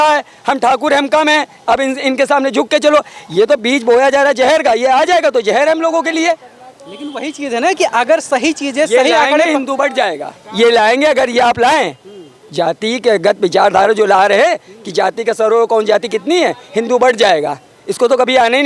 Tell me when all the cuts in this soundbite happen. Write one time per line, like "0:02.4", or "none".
none